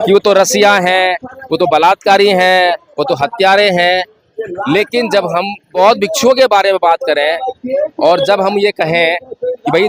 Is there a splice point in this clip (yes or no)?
yes